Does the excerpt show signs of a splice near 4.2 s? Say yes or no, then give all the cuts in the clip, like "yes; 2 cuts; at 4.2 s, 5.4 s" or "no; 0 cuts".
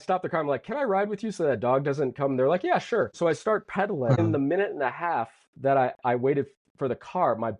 yes; 2 cuts; at 3.1 s, 4.2 s